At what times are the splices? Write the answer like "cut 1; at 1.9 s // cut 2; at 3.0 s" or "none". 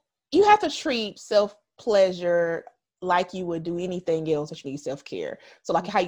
cut 1; at 1.1 s